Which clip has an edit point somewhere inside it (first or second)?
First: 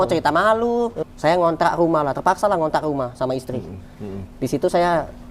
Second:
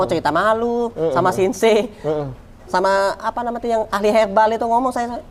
first